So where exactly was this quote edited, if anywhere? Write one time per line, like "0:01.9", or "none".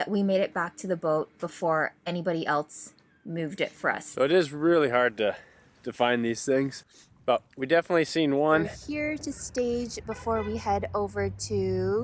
0:04.1
0:08.8